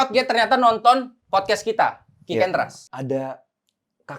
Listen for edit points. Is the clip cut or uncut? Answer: cut